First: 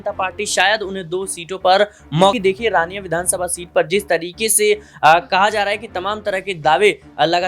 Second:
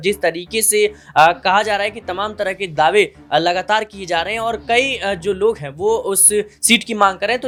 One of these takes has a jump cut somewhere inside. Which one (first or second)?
first